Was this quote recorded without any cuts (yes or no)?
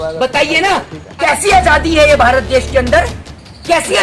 no